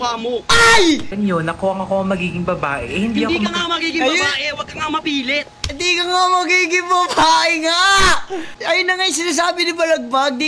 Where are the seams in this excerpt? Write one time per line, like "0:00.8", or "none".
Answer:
0:01.1